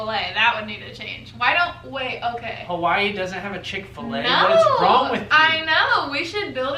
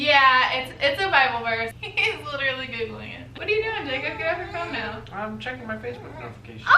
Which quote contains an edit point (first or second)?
second